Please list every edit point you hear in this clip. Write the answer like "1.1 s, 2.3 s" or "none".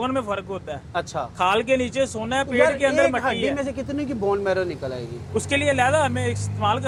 none

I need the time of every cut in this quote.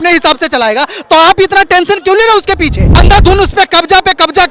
3.0 s

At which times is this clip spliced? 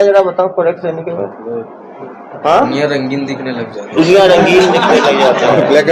none

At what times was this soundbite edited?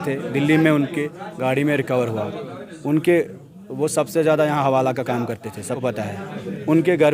5.8 s

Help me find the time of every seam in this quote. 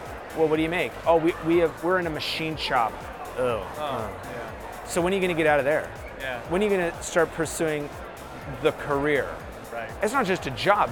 2.9 s, 9.6 s

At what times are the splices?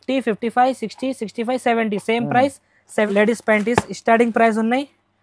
3.1 s

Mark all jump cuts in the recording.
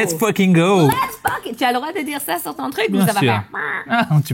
none

